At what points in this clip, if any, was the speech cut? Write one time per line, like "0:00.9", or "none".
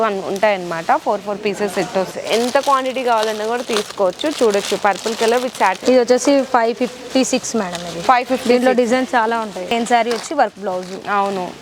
0:02.1
0:05.8
0:09.7

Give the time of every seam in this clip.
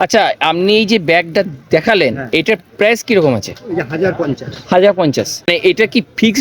0:05.5

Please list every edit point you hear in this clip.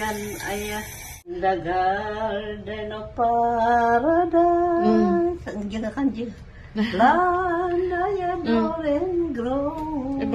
0:01.4

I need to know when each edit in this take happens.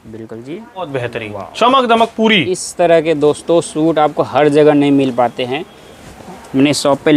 0:00.9

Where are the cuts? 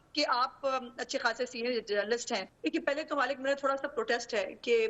0:02.6

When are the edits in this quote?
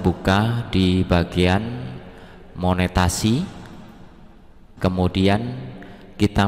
0:04.6

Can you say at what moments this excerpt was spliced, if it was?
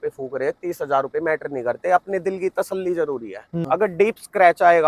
0:03.6

